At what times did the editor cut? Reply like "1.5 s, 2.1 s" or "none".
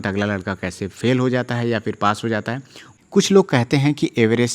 2.8 s